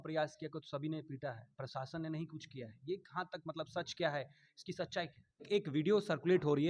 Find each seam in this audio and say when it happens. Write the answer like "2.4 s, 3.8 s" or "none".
5.4 s